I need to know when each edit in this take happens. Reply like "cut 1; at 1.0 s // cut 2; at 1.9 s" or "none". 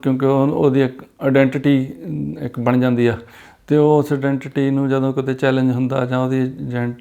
none

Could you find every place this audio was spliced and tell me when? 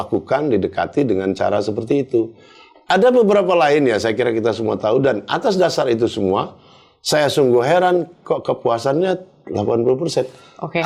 none

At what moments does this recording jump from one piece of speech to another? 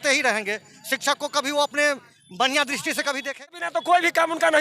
cut 1; at 3.5 s

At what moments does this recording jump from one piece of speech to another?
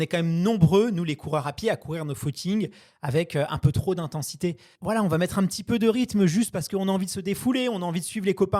cut 1; at 4.7 s

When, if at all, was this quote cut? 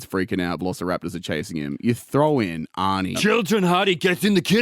cut 1; at 3.2 s

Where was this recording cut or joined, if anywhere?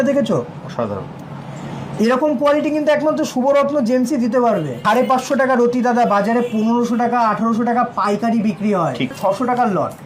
cut 1; at 4.7 s // cut 2; at 9.2 s

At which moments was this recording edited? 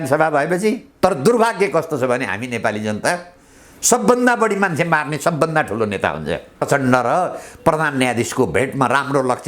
cut 1; at 0.9 s // cut 2; at 6.6 s

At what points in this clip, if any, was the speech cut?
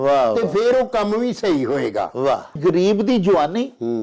cut 1; at 2.6 s

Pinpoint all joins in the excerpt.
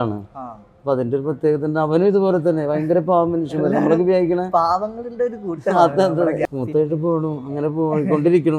cut 1; at 6.4 s

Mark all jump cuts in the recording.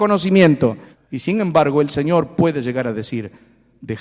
cut 1; at 0.9 s

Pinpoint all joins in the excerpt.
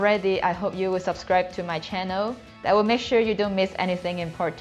none

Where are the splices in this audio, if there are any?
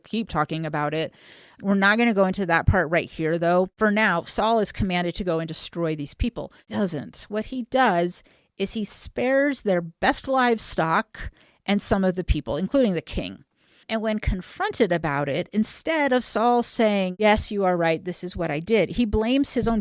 cut 1; at 3.7 s // cut 2; at 6.6 s // cut 3; at 17.1 s

